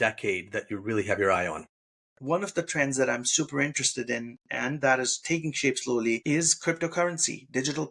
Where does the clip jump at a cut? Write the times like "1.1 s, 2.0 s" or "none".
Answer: 2.2 s